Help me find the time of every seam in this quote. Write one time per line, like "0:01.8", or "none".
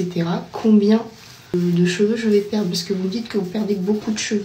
0:01.5